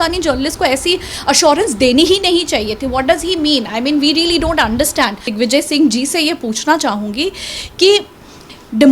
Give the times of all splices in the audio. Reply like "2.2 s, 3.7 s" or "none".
5.3 s